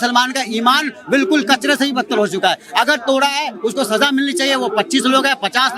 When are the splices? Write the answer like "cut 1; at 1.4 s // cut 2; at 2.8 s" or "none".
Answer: none

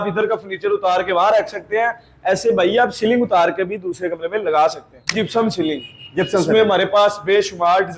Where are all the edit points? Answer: cut 1; at 5.1 s

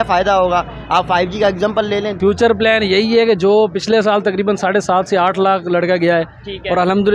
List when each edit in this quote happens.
cut 1; at 2.1 s

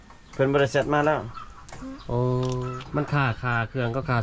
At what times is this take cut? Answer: cut 1; at 2.7 s

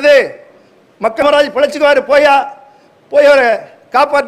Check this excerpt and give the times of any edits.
cut 1; at 1.2 s

